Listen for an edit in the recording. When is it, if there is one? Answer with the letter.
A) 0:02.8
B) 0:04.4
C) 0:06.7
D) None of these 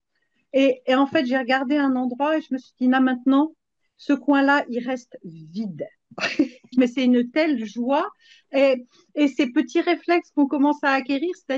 C